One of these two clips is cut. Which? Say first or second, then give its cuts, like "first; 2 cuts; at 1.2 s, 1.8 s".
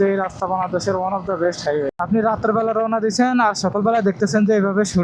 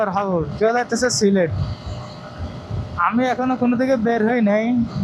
first; 1 cut; at 2.0 s